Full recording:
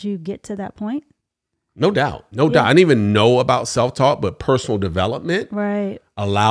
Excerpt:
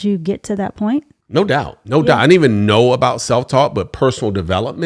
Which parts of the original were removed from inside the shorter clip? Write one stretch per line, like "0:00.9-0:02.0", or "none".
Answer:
0:01.2-0:01.6